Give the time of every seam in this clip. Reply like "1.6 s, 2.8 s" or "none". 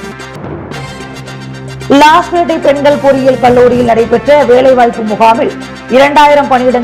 none